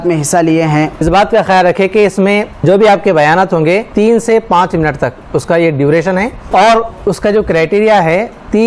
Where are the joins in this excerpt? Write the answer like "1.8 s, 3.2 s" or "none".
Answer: 1.0 s, 2.6 s, 3.9 s, 6.4 s